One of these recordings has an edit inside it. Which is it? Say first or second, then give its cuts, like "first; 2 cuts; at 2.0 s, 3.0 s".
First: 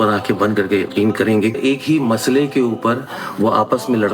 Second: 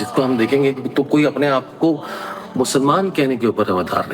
first; 1 cut; at 1.6 s